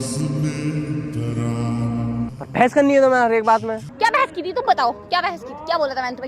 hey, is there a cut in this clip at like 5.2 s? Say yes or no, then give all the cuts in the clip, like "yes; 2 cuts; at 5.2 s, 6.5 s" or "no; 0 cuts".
no; 2 cuts; at 2.3 s, 3.9 s